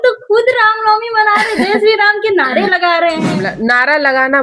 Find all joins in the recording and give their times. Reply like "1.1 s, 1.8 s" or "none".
3.5 s